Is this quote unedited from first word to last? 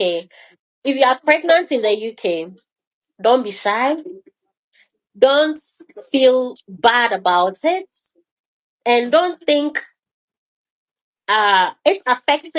yes; 0 cuts

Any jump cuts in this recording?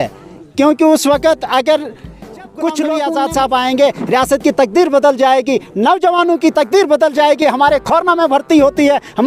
yes; 1 cut; at 3.0 s

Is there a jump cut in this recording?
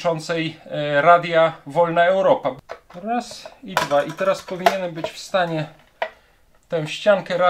yes; 1 cut; at 2.6 s

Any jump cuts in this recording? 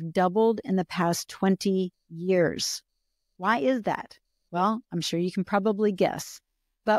no; 0 cuts

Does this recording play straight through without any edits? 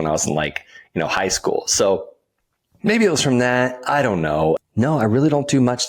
no; 1 cut; at 4.6 s

